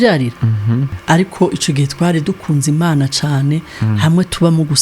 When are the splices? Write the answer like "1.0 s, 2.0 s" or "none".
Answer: 0.9 s